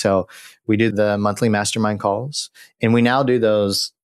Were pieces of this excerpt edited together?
yes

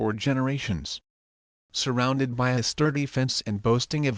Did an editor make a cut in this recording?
yes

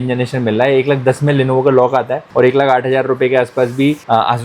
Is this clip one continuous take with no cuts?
yes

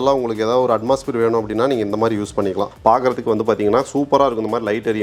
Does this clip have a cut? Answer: yes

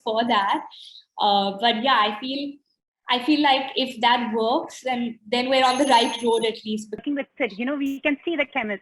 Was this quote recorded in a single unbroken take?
no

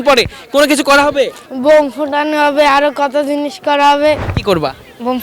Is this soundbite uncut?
no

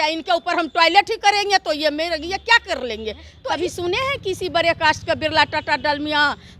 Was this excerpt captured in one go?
no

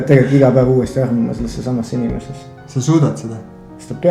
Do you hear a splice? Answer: no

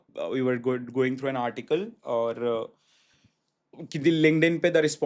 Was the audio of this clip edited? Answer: no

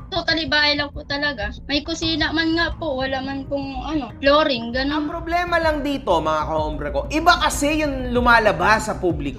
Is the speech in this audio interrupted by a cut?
yes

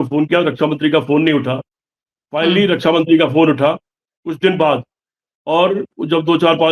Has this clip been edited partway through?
no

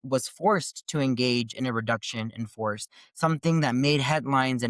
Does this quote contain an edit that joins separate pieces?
no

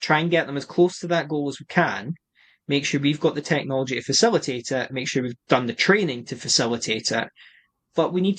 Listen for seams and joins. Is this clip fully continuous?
yes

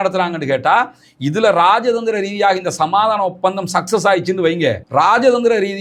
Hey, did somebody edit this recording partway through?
no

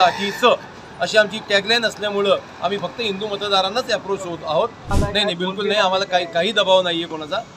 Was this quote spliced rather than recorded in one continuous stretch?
yes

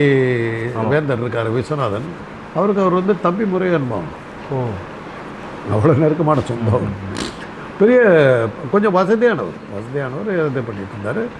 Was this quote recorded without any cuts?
yes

